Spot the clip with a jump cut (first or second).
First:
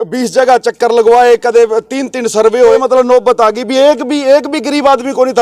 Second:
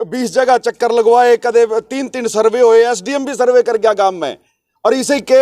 first